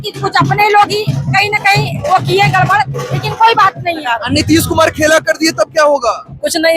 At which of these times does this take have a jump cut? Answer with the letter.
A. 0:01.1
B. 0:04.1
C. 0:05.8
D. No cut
B